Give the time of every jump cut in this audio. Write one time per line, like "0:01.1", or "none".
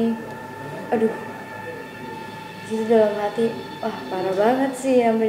none